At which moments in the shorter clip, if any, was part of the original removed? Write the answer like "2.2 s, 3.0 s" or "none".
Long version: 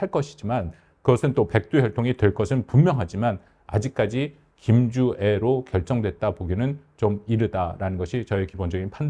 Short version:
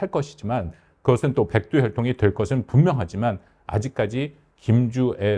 none